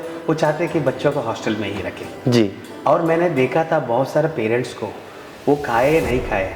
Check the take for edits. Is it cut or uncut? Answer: uncut